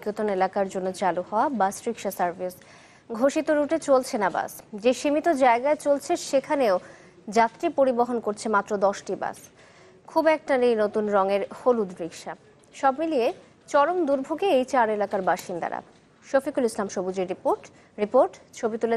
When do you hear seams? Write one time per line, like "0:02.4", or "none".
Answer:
none